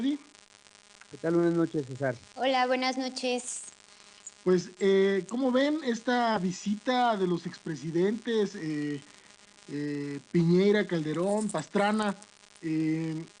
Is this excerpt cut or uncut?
cut